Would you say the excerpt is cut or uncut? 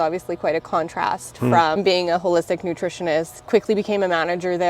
cut